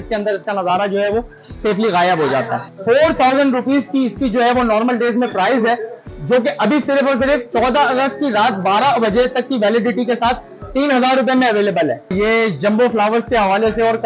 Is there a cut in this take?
yes; 2 cuts; at 2.7 s, 12.1 s

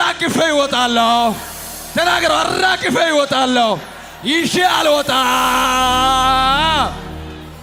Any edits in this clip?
no; 0 cuts

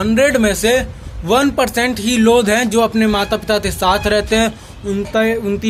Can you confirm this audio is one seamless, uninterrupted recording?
yes; 0 cuts

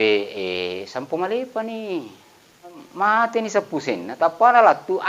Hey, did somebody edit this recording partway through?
yes; 1 cut; at 2.8 s

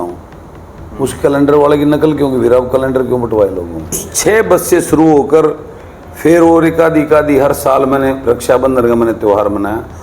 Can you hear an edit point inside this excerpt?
yes; 1 cut; at 4.1 s

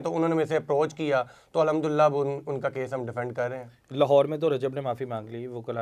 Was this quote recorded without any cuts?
yes; 0 cuts

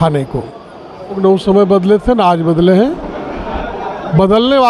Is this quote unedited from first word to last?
no; 1 cut; at 1.2 s

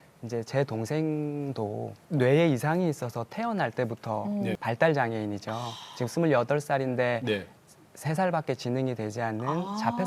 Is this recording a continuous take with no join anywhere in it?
no; 2 cuts; at 1.9 s, 4.6 s

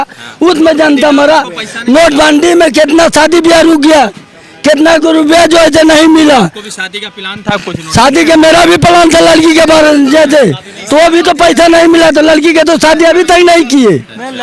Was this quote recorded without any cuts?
yes; 0 cuts

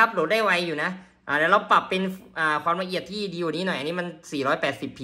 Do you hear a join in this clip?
no; 0 cuts

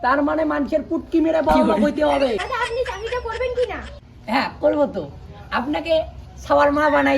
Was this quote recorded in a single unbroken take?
no; 1 cut; at 2.5 s

